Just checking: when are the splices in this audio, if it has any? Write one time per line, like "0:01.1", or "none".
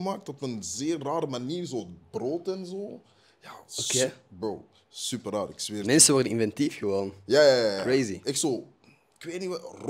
none

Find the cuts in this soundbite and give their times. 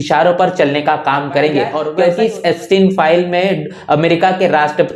0:01.8

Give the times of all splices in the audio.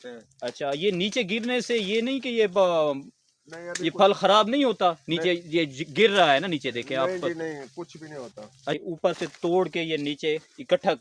0:08.7

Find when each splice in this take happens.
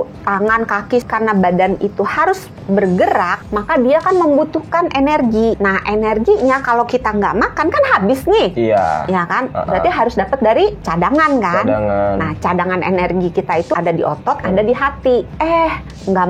0:01.0
0:03.3
0:05.6
0:10.8
0:13.7
0:15.3

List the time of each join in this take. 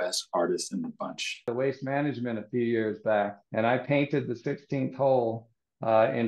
0:01.5
0:03.4

